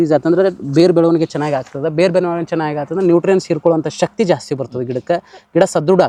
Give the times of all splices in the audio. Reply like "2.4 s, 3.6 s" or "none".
none